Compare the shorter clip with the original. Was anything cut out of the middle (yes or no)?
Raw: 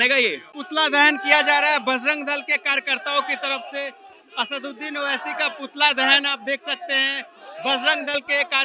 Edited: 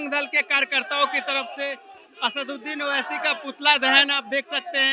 no